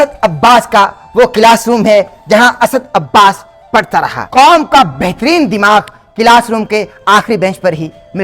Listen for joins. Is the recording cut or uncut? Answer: cut